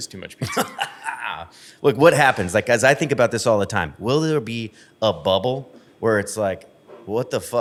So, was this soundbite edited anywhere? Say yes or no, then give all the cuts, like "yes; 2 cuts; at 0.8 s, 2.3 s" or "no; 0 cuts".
no; 0 cuts